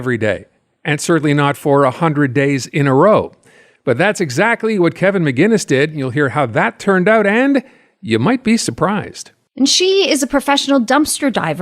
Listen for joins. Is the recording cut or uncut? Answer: cut